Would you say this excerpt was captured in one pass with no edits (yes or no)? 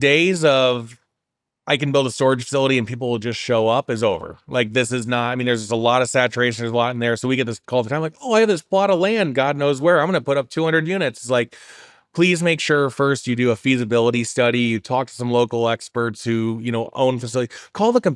yes